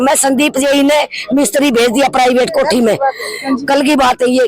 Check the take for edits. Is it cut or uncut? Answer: uncut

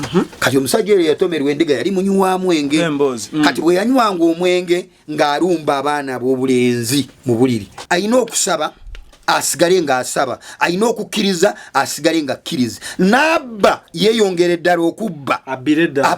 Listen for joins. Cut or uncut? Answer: cut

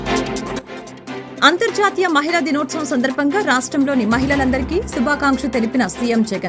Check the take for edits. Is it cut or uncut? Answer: uncut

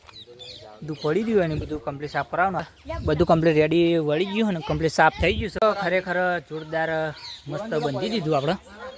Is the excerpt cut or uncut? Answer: cut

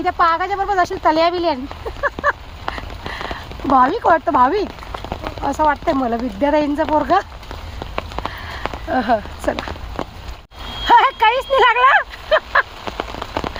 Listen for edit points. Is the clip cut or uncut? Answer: uncut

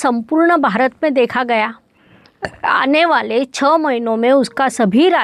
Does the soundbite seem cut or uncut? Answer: uncut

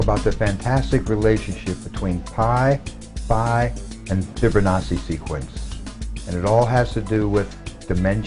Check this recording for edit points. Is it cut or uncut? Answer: cut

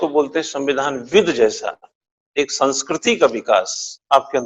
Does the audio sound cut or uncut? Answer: uncut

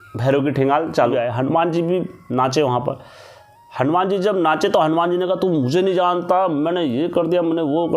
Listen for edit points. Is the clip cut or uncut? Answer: cut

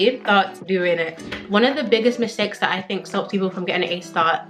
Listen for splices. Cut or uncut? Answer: cut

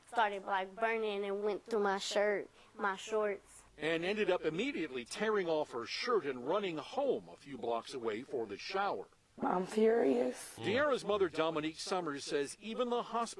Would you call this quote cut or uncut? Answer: uncut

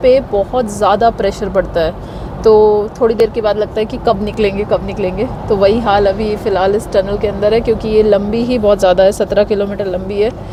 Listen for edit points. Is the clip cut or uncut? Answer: uncut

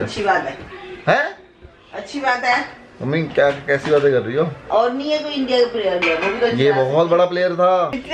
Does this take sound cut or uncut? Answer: uncut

